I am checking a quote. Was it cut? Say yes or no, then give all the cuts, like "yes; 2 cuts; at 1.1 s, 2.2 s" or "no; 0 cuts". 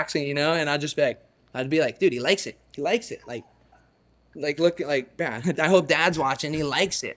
no; 0 cuts